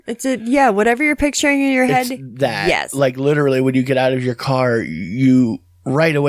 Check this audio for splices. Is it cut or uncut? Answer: cut